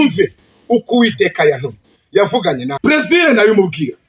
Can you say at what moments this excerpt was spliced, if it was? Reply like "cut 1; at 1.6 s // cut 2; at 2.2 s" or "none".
cut 1; at 2.7 s

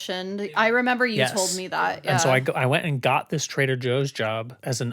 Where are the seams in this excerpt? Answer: cut 1; at 1.7 s

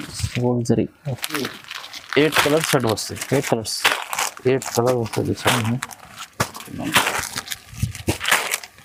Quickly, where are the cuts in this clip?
none

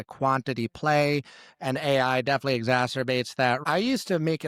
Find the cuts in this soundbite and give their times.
none

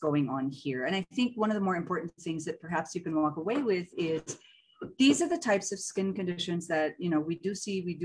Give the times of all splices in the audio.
none

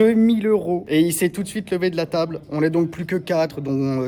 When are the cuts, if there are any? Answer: none

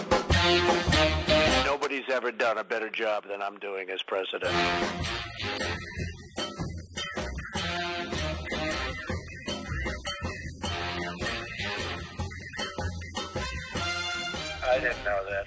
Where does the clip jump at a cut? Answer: none

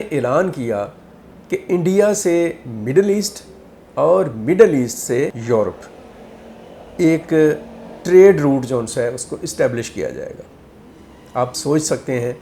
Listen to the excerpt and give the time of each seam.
none

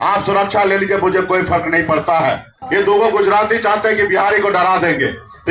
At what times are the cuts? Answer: cut 1; at 2.5 s

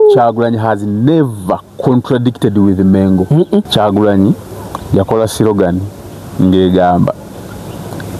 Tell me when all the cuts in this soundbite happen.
cut 1; at 3.7 s

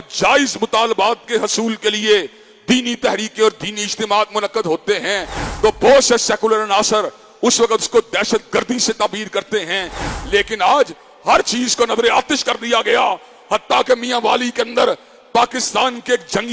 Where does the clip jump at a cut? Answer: none

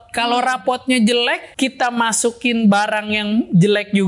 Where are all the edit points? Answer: cut 1; at 1.5 s

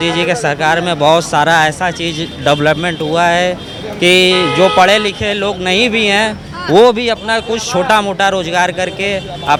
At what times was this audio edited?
none

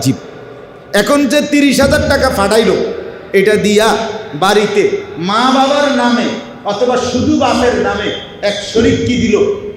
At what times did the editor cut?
none

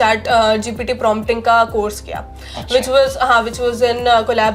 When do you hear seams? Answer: none

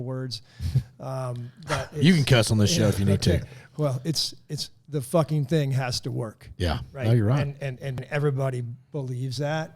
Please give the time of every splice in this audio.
cut 1; at 7.9 s

